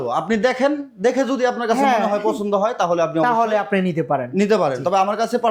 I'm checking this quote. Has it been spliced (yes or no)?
no